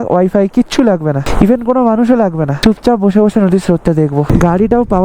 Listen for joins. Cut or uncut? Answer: cut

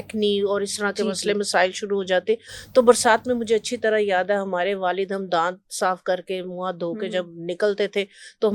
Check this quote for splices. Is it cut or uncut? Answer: uncut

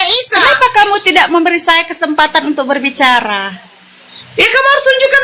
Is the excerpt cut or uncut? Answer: uncut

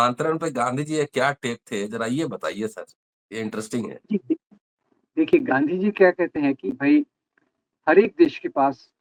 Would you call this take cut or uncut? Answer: uncut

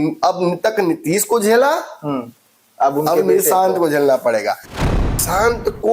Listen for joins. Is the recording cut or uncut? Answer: cut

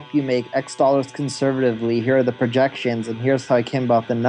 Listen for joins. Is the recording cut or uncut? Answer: uncut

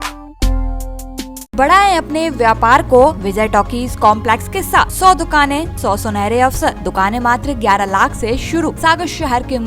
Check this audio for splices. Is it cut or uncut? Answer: cut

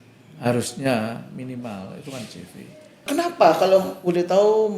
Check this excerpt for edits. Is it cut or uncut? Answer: cut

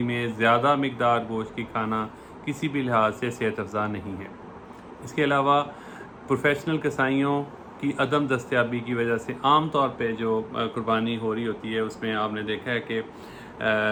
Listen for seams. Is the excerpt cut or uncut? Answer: uncut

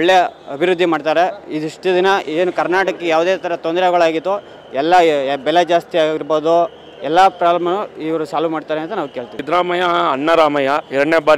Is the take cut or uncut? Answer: cut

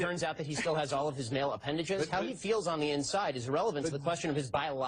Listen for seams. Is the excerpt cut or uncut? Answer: cut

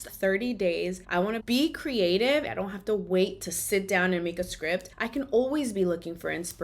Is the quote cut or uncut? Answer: cut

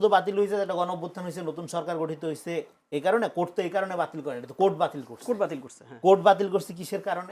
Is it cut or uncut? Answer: uncut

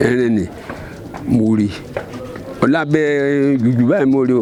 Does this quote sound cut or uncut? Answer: uncut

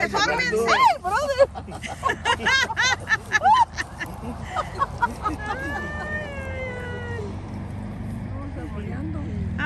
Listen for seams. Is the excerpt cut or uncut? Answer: uncut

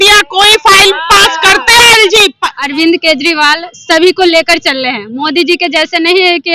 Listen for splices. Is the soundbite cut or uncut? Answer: cut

